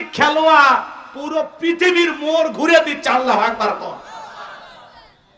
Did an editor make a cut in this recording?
no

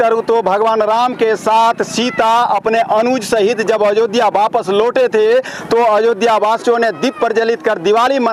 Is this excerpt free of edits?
yes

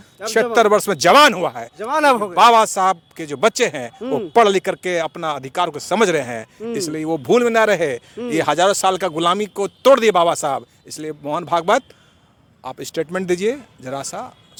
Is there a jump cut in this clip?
no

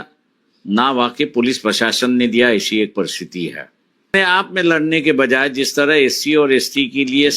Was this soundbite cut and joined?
yes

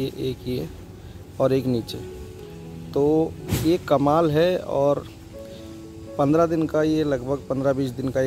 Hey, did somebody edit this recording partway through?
no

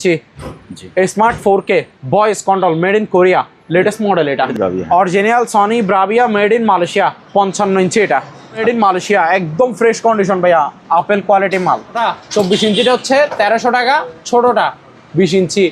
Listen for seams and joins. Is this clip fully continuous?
no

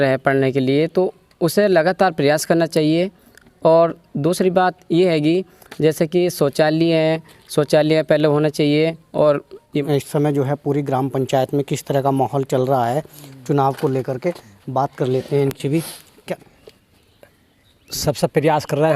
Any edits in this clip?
yes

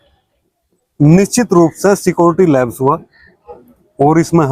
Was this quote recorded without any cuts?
yes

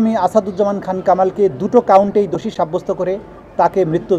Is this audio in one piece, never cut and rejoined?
yes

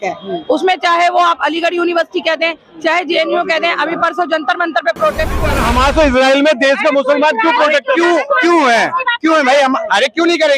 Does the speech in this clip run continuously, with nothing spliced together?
no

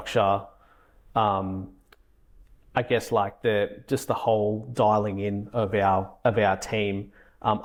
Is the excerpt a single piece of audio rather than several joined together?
yes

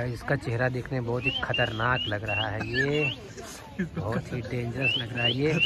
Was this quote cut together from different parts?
no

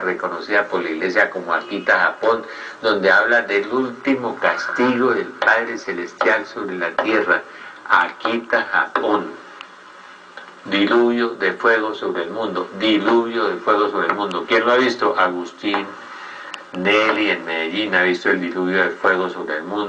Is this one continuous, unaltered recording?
yes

